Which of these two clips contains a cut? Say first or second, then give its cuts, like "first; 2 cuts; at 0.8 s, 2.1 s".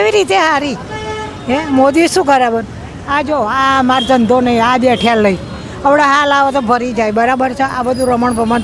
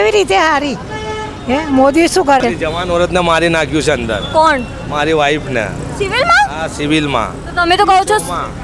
second; 1 cut; at 2.4 s